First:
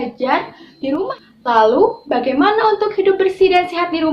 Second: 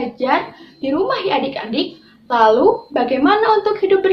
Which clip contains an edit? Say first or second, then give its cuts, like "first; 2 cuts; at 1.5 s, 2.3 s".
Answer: first; 1 cut; at 1.1 s